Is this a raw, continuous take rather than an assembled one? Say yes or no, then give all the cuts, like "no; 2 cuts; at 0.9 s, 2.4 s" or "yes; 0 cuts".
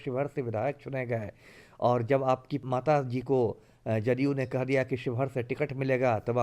no; 1 cut; at 2.5 s